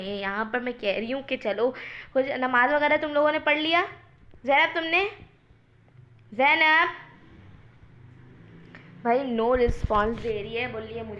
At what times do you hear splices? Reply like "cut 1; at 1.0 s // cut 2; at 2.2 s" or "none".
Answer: none